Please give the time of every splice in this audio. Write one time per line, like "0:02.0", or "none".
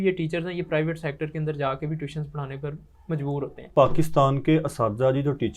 0:03.7